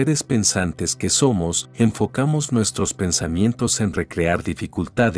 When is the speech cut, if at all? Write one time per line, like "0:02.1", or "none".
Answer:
0:01.6